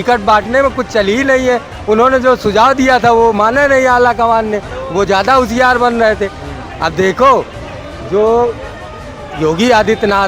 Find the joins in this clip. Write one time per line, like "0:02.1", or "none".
none